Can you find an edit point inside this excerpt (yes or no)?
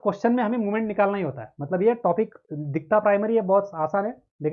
no